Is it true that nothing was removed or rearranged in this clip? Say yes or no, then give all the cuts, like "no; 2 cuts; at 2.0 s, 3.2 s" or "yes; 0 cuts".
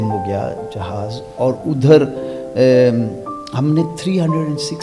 yes; 0 cuts